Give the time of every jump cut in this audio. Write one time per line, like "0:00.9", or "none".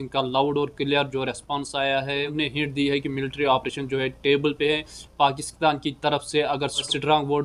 none